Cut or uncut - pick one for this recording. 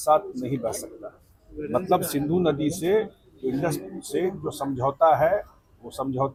uncut